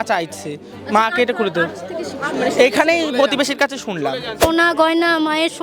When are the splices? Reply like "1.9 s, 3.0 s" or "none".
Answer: 4.4 s